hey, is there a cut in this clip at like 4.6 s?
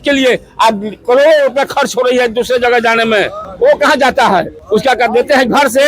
yes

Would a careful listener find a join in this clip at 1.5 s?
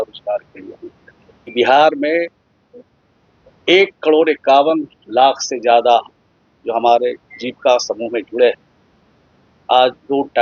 yes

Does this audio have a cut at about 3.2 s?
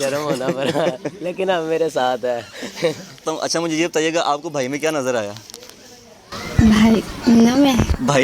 yes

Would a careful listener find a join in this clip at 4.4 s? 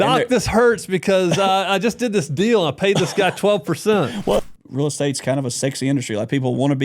yes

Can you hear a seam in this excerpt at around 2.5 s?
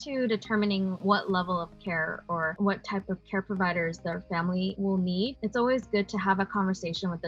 yes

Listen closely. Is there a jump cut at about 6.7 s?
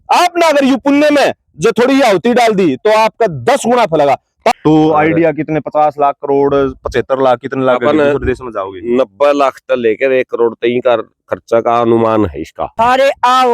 no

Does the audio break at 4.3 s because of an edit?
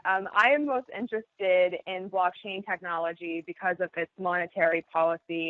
no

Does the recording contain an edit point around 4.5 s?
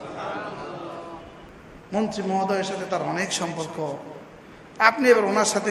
no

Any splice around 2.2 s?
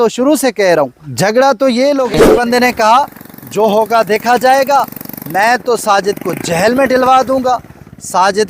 yes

